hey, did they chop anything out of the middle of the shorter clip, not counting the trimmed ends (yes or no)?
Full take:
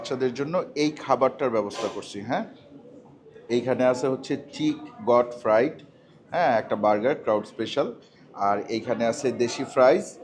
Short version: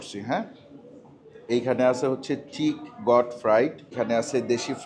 yes